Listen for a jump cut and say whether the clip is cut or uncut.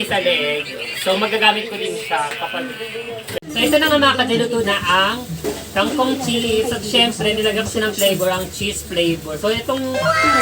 cut